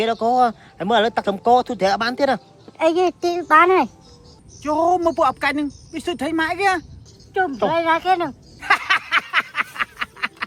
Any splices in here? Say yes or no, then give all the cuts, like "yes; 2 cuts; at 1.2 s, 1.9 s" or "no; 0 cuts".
no; 0 cuts